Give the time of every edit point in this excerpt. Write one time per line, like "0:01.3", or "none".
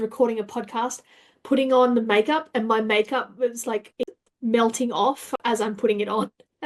0:04.2
0:05.4